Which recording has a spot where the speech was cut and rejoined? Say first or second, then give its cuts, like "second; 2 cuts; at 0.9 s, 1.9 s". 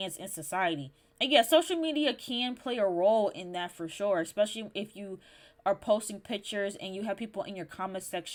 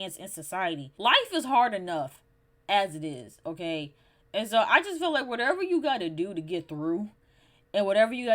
second; 1 cut; at 0.9 s